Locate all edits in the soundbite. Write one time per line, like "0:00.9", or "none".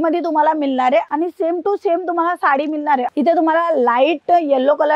0:01.1
0:03.1